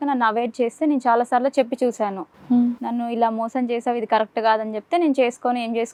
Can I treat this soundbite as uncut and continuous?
yes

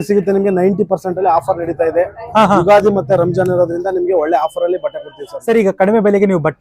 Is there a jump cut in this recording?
no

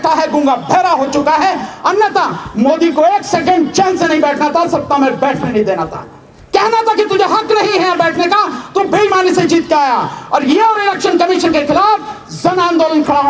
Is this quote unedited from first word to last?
yes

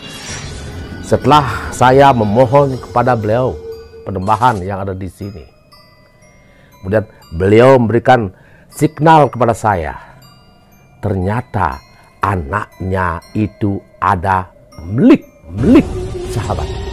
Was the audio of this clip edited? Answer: no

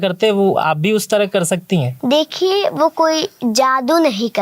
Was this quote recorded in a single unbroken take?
no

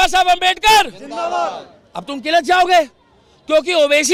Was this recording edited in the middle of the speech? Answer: no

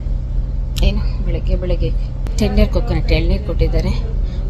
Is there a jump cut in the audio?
yes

